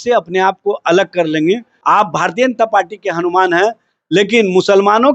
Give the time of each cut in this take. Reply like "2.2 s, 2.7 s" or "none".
1.7 s

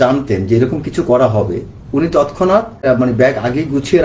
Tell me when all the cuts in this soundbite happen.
2.8 s

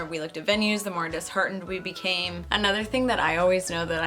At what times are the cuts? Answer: 2.4 s

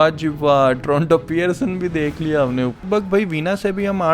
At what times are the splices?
2.8 s

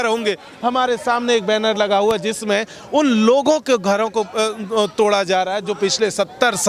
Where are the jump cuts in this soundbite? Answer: none

